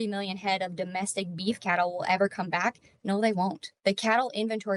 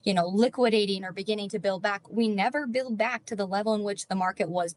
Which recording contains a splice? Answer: first; 1 cut; at 3.7 s

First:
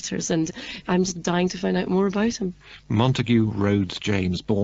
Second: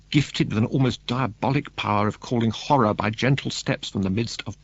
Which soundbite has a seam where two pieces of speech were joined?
second; 1 cut; at 1.4 s

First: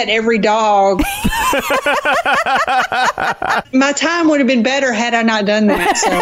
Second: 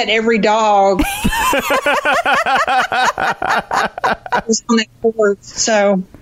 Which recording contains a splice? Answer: first; 1 cut; at 3.6 s

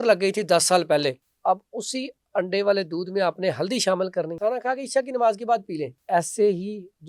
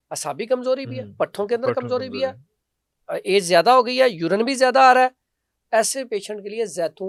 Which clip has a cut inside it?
first; 3 cuts; at 1.3 s, 4.3 s, 6.0 s

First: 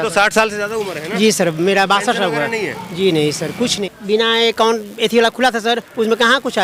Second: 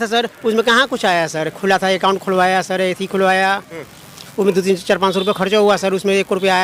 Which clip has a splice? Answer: first; 1 cut; at 3.8 s

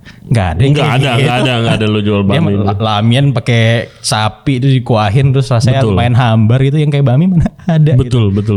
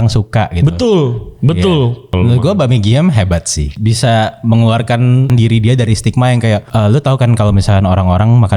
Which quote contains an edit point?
second; 4 cuts; at 2.1 s, 3.8 s, 5.3 s, 6.7 s

